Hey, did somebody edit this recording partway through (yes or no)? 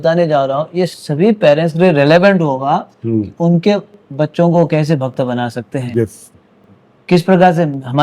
no